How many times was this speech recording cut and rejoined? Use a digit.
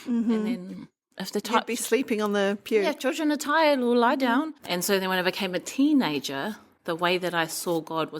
2